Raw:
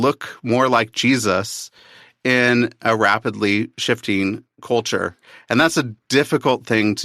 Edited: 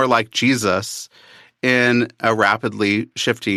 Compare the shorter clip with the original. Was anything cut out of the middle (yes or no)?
no